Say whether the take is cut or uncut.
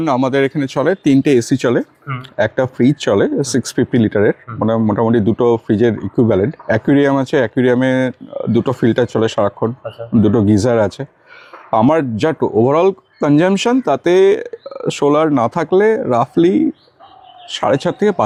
uncut